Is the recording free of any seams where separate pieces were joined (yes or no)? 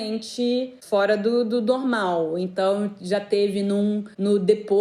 yes